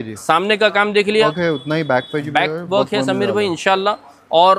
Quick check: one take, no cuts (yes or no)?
no